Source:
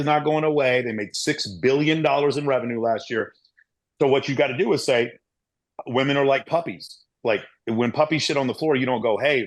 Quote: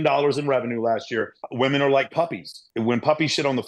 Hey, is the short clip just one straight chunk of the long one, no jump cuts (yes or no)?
no